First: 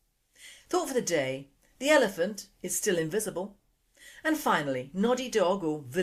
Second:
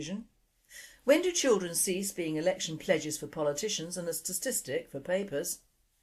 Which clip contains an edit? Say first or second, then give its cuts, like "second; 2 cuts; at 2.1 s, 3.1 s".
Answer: first; 1 cut; at 2.7 s